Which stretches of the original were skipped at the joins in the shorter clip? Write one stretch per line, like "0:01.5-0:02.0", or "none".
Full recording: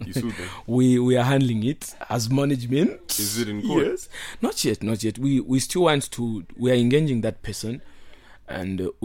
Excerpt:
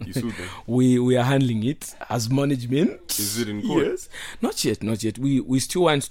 none

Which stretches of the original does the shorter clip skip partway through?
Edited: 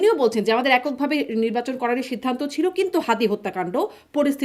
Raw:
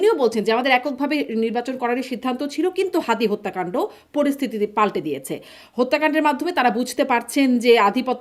none

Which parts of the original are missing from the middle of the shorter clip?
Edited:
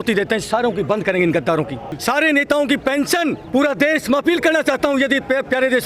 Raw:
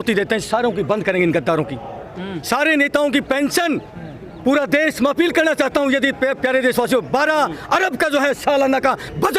0:01.9-0:02.3
0:03.9-0:04.3

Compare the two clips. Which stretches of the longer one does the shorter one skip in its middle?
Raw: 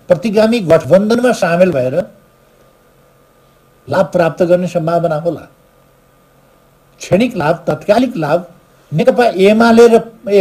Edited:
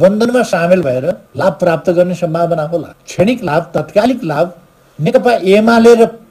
0:02.2-0:03.8
0:05.5-0:06.9

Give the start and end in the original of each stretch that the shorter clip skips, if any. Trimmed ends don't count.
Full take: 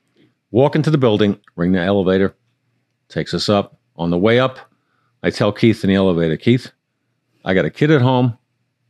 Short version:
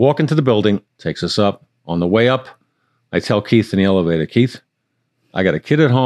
0:01.5-0:03.0

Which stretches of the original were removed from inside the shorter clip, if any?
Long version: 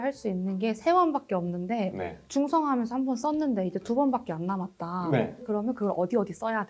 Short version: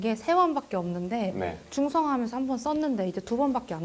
none

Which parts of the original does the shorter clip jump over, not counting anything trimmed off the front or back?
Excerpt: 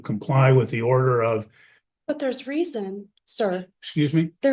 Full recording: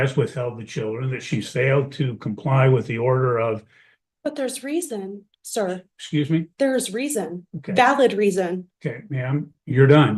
none

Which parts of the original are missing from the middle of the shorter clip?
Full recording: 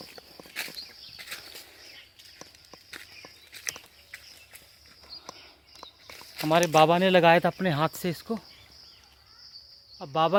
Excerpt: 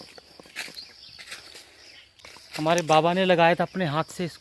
0:02.1-0:06.0

